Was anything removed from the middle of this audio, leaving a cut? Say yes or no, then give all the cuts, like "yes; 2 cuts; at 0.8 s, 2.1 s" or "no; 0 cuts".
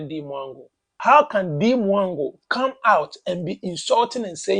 yes; 1 cut; at 0.9 s